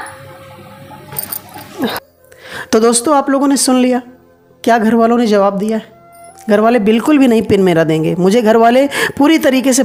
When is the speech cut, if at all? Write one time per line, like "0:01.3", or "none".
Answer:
none

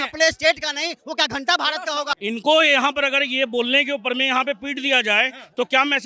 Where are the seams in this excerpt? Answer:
0:02.1

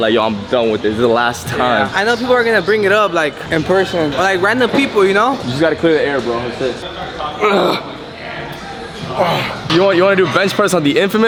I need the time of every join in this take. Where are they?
none

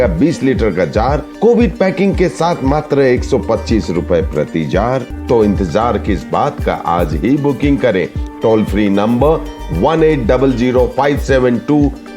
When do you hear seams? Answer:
0:05.1

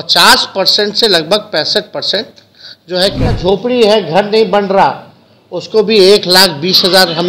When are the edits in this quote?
0:03.3

